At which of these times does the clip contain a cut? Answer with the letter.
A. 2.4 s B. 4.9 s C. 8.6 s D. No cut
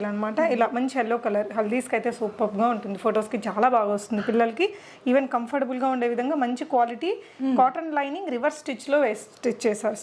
D